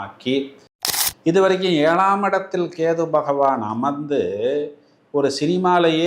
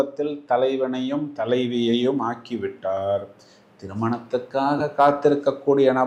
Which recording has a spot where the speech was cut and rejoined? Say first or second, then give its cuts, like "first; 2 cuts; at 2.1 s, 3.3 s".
first; 1 cut; at 0.9 s